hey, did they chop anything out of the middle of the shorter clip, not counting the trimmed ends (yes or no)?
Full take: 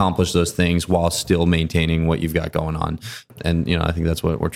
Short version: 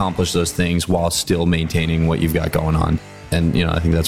yes